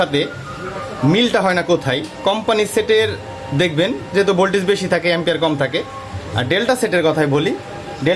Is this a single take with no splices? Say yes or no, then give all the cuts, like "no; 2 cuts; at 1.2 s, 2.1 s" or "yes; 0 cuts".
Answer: yes; 0 cuts